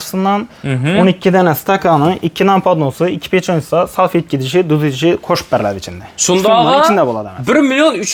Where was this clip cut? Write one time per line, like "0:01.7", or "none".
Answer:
none

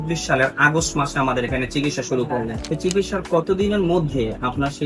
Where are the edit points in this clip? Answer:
0:02.6

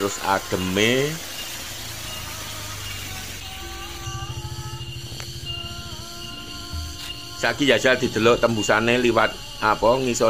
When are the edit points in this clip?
none

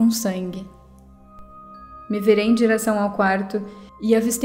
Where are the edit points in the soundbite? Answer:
0:01.3

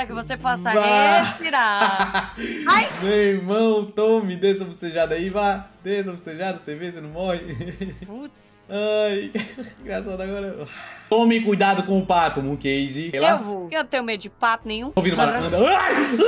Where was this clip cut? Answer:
0:11.1
0:14.9

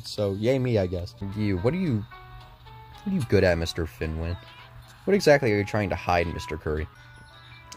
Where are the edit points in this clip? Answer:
0:01.0
0:06.8

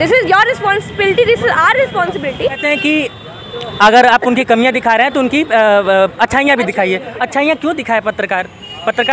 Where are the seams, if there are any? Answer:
0:02.6

